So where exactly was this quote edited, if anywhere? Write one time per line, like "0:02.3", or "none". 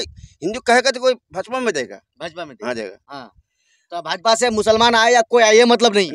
none